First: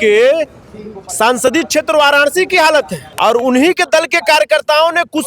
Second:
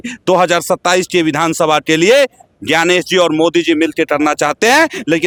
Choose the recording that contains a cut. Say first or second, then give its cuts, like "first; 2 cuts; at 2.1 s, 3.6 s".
first; 1 cut; at 3.0 s